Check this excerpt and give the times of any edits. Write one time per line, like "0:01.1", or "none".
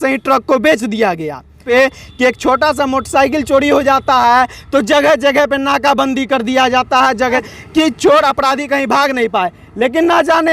0:01.6
0:07.4

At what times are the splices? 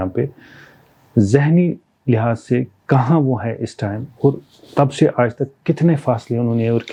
none

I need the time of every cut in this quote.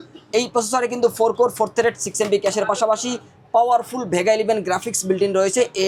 none

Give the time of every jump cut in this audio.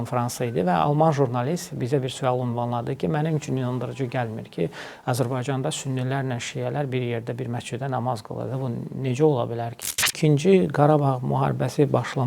0:10.1

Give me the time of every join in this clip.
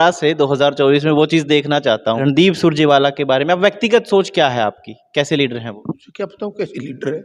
0:02.2
0:06.1

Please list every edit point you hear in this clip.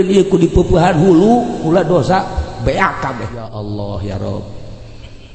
0:03.4

